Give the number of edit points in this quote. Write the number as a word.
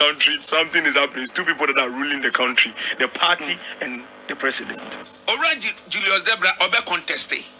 one